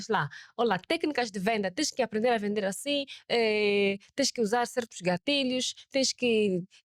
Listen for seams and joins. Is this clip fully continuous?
yes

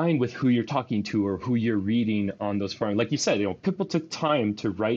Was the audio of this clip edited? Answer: no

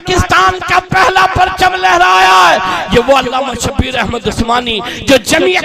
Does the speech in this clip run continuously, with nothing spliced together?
yes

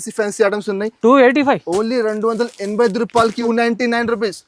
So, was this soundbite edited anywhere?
yes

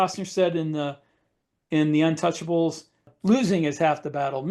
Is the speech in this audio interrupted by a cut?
yes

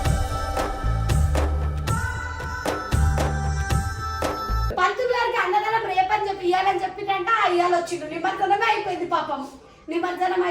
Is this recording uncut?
no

